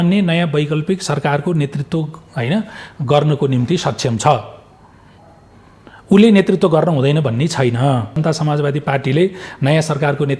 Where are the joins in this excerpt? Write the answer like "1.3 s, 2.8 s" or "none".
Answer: 8.2 s